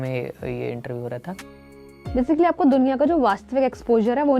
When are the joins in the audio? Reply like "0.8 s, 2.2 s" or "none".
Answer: 1.8 s

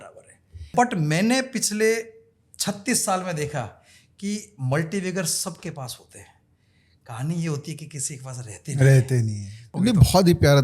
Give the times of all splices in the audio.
0.7 s, 9.7 s

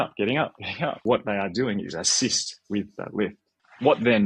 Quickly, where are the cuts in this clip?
1.0 s

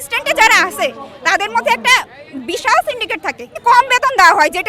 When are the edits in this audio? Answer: 3.6 s

